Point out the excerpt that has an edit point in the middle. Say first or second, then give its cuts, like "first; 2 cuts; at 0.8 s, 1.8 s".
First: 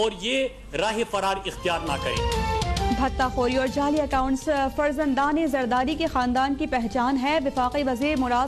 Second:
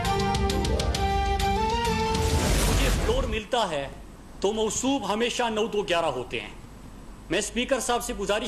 second; 2 cuts; at 0.9 s, 2.1 s